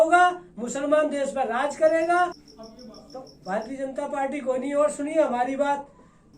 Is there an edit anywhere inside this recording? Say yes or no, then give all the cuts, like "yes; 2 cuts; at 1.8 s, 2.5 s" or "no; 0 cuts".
yes; 1 cut; at 2.4 s